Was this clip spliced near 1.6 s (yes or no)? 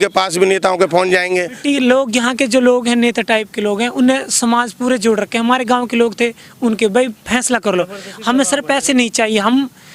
yes